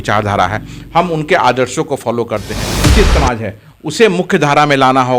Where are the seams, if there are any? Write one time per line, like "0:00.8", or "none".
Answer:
0:02.8